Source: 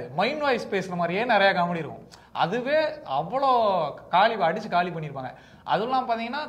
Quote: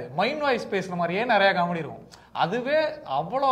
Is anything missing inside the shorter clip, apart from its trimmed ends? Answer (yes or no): no